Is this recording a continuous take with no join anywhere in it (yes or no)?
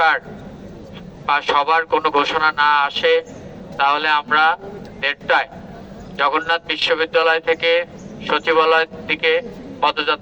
yes